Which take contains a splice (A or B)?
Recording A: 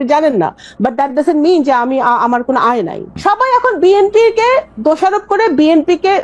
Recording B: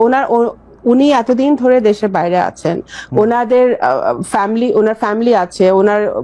A